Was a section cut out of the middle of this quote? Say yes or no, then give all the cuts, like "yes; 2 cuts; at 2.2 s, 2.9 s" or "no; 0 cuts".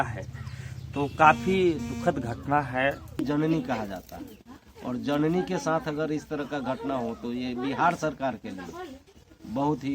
yes; 1 cut; at 3.2 s